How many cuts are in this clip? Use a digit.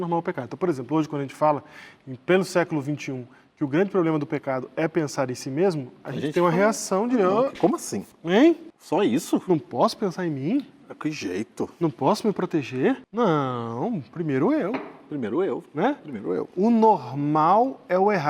2